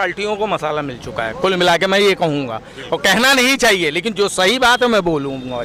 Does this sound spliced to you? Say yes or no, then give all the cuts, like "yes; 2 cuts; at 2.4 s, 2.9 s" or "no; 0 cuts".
no; 0 cuts